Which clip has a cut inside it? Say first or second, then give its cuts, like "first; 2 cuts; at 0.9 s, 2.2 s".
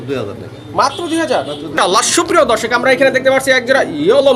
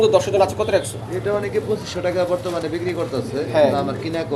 first; 1 cut; at 1.7 s